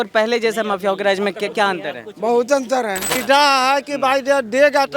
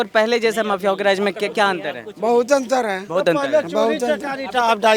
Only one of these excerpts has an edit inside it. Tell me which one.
first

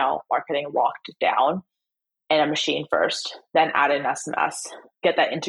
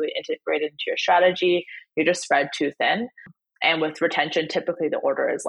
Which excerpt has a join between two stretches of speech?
second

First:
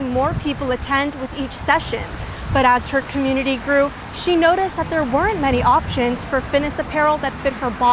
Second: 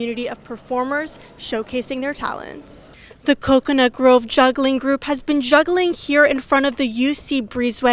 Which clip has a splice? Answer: second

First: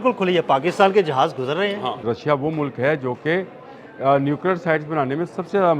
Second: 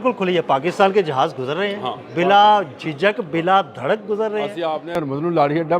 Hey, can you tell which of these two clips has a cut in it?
first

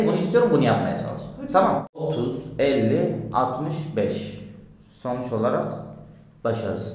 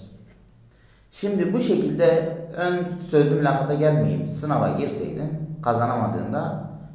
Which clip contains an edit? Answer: first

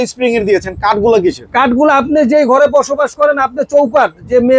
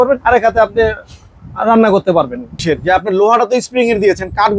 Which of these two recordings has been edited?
second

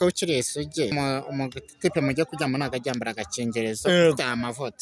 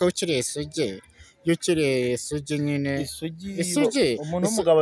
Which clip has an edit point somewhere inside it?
first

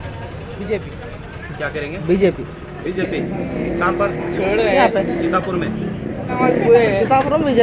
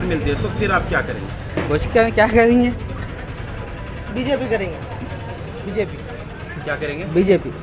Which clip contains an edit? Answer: first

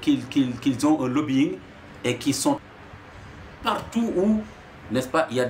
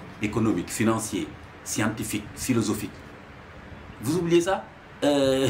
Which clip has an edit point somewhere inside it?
first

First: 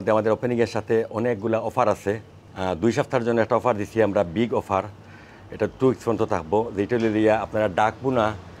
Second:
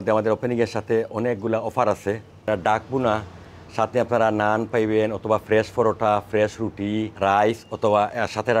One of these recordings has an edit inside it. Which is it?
second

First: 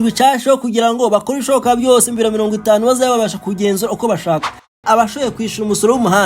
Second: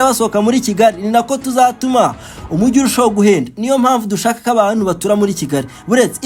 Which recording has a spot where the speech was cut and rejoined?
first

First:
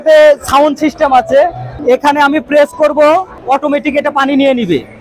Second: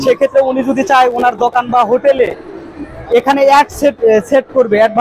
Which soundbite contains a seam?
first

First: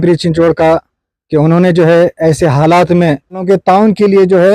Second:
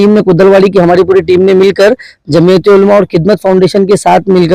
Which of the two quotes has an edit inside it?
first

